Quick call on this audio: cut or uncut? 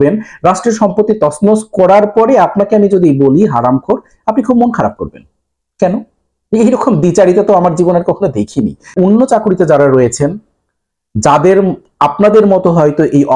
cut